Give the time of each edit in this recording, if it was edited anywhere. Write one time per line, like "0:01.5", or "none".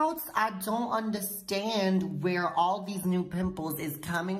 none